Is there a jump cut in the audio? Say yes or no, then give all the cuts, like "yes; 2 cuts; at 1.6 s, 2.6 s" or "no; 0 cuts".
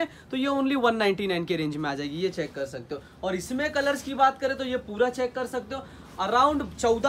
no; 0 cuts